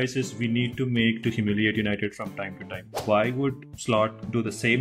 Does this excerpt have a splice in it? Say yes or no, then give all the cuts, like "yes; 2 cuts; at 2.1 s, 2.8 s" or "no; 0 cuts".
yes; 1 cut; at 3.0 s